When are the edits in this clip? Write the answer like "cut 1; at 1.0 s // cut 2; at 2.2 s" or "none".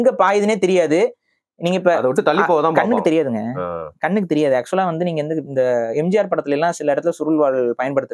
none